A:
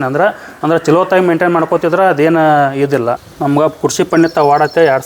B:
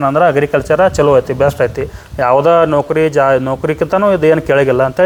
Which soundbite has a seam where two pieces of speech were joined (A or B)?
A